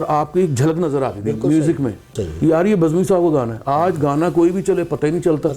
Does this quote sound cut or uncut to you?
cut